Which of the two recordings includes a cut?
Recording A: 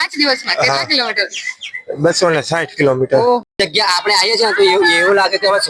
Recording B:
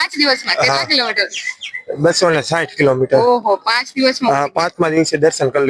A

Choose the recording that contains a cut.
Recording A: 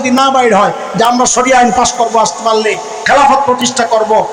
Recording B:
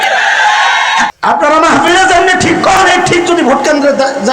B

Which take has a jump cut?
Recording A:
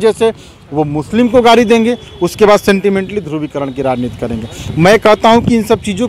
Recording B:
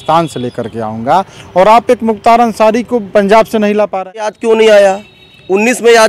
B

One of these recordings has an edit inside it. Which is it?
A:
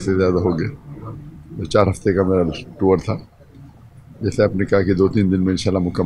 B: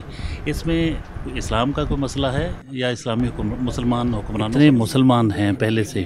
B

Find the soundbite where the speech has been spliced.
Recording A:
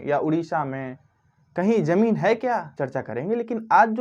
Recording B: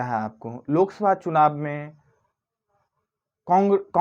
A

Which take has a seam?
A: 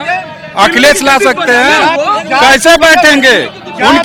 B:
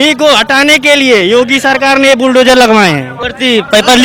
B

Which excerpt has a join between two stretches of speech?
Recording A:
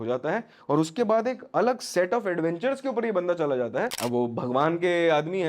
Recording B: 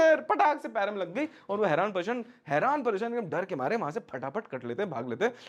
A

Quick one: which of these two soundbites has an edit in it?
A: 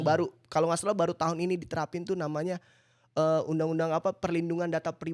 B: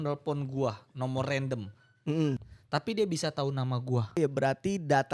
B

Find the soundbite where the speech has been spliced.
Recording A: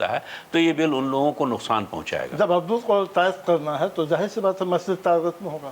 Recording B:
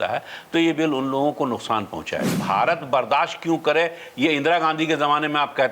B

